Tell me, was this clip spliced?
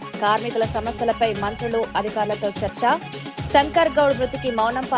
no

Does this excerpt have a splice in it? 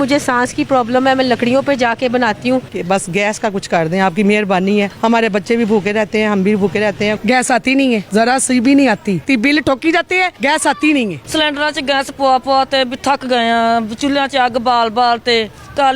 yes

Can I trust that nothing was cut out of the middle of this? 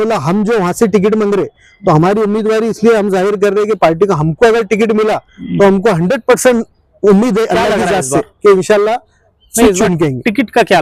yes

